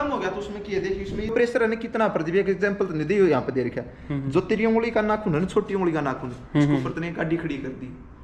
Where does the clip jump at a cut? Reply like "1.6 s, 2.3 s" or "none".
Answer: 1.3 s